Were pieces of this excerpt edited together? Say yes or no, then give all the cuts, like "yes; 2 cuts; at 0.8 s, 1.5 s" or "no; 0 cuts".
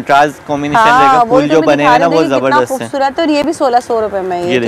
no; 0 cuts